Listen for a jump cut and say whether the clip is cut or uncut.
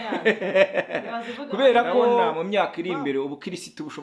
cut